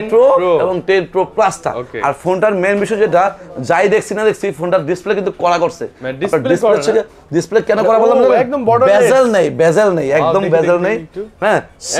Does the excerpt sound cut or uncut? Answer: uncut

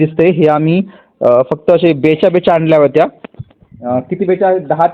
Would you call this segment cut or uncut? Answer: uncut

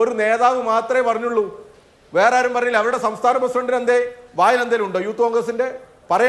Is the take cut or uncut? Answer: uncut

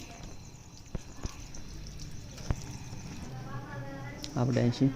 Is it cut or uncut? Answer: cut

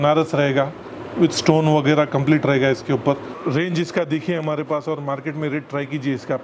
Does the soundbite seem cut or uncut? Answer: cut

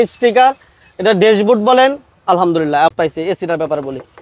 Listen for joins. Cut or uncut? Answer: cut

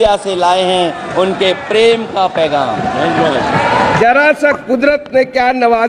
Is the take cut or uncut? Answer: cut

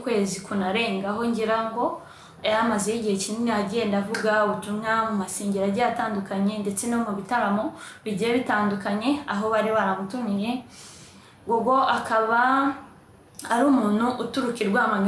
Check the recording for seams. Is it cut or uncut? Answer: uncut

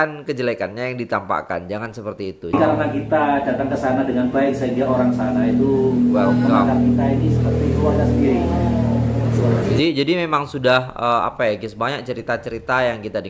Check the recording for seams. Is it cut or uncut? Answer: cut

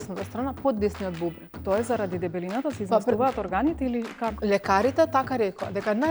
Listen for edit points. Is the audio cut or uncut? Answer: cut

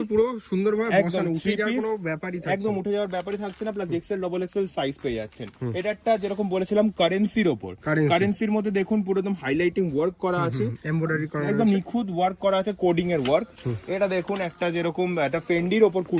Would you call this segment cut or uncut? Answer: uncut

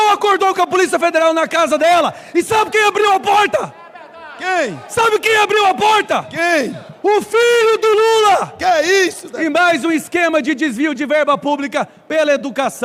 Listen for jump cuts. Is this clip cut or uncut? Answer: uncut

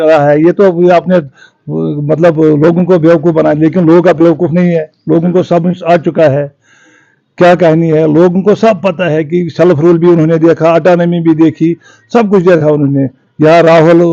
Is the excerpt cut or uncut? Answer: uncut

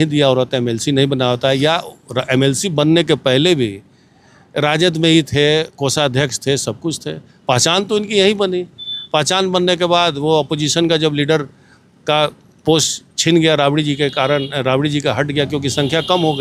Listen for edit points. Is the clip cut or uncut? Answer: uncut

